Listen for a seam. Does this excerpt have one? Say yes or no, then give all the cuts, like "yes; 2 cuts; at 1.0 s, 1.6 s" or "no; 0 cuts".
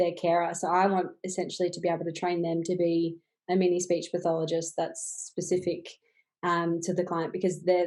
no; 0 cuts